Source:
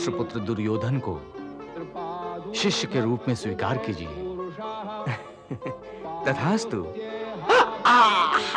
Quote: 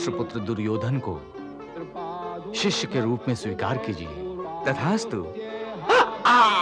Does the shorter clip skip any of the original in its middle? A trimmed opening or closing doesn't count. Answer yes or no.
yes